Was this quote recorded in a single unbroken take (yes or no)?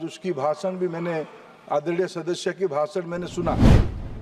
yes